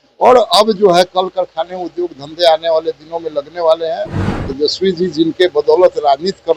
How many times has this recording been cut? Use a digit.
1